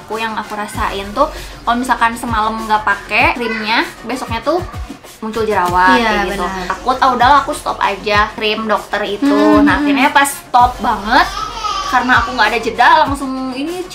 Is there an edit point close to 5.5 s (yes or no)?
no